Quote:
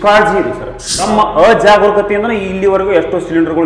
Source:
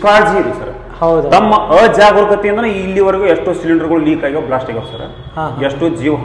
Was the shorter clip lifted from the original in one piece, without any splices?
no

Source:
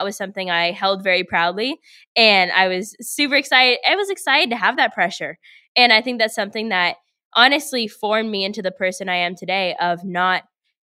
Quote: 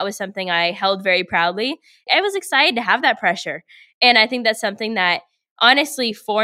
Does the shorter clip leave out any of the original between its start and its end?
yes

